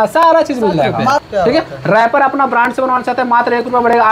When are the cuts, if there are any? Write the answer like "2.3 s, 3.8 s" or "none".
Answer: 1.2 s